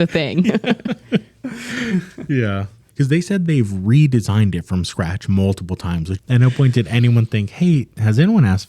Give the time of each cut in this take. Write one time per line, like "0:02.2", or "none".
0:02.8
0:06.1